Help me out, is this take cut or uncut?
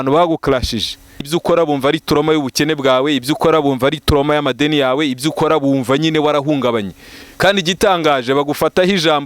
cut